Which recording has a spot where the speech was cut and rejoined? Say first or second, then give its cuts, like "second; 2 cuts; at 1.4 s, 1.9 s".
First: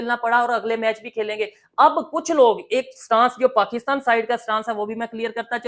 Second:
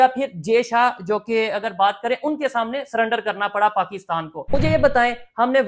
second; 1 cut; at 4.5 s